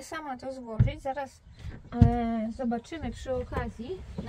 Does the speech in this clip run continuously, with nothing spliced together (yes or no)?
yes